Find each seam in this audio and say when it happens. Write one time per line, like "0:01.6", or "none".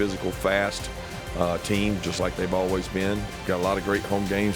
0:03.3

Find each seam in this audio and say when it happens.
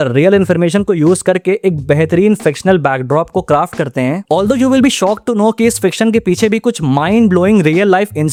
none

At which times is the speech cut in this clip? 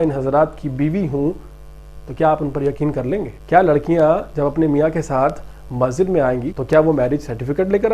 0:03.3
0:06.5

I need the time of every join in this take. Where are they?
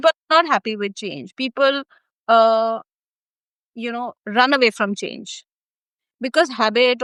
none

